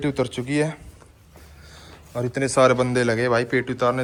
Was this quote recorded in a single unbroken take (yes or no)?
yes